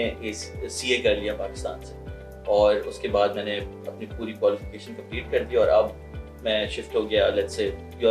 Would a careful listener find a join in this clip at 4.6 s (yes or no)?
no